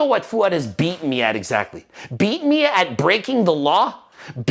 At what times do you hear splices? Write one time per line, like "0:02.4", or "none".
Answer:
none